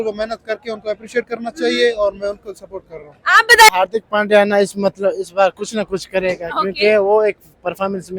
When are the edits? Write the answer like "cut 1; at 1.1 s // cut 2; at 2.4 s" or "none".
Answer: cut 1; at 3.7 s